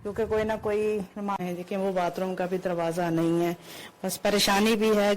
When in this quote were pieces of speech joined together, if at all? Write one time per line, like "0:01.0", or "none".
0:01.4